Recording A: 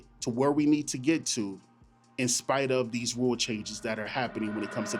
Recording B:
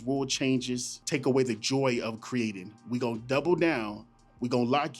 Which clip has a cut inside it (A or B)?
B